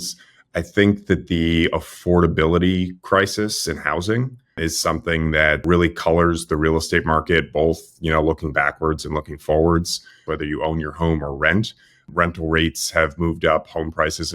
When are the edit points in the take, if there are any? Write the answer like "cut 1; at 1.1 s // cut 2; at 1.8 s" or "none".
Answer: cut 1; at 4.6 s // cut 2; at 5.6 s // cut 3; at 10.2 s // cut 4; at 12.0 s